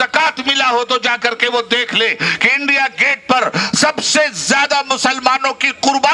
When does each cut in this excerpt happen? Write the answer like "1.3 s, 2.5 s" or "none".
none